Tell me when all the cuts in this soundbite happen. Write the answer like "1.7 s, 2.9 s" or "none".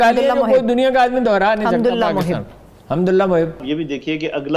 3.7 s